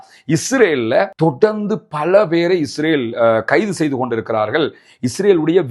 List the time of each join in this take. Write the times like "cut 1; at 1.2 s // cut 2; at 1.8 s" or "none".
none